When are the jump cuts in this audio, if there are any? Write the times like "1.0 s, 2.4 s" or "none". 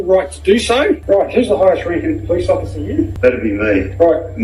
1.0 s, 3.1 s